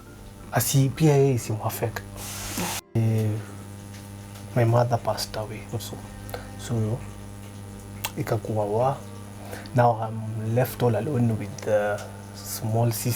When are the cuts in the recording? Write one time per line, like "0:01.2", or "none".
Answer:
0:03.0